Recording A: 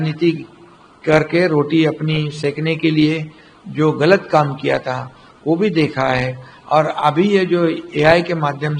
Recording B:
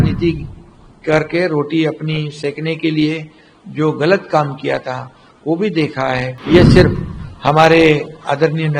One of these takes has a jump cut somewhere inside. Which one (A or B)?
B